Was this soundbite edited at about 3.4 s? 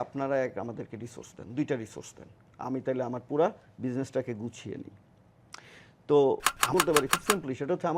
no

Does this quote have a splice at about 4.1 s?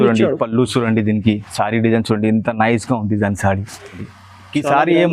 yes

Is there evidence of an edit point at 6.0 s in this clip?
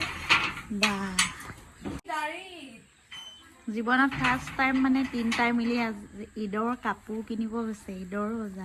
no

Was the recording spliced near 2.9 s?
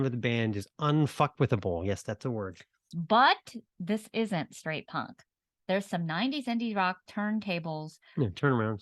yes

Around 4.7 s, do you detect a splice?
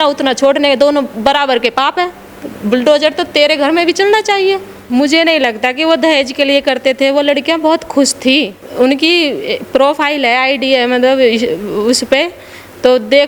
yes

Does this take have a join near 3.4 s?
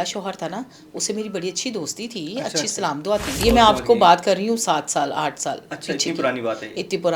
yes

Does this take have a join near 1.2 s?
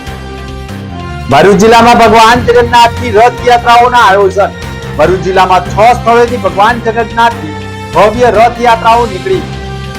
yes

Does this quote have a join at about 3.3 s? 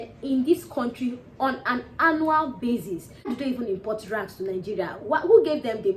yes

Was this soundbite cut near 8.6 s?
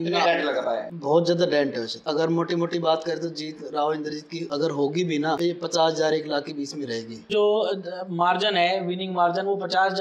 no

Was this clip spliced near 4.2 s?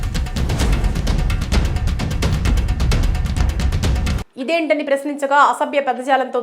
yes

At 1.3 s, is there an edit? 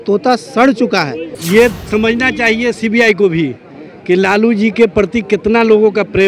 yes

